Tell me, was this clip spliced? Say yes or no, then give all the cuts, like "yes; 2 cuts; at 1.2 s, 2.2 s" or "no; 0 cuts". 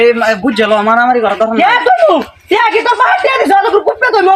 no; 0 cuts